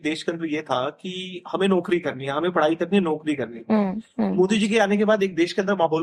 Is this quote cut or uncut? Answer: uncut